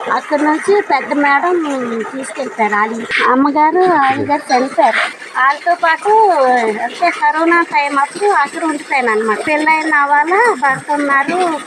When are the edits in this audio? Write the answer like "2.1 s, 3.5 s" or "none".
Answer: 3.2 s, 5.1 s, 9.4 s

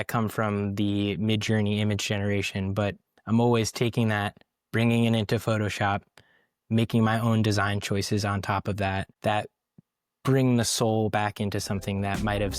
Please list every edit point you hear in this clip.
9.1 s

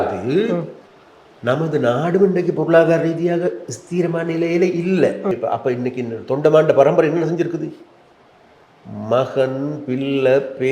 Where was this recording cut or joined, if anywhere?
5.3 s

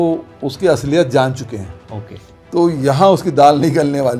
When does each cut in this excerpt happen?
none

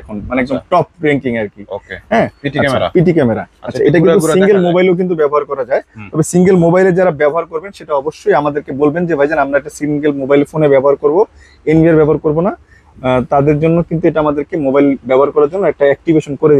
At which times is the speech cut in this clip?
none

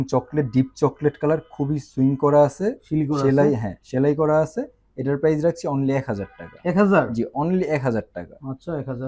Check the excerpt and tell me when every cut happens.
none

